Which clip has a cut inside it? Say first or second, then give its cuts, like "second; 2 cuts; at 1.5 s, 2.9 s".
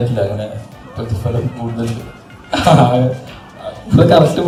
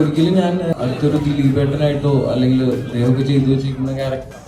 second; 2 cuts; at 0.7 s, 2.9 s